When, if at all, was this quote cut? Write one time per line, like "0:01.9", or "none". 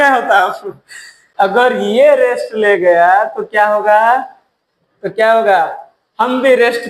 0:01.2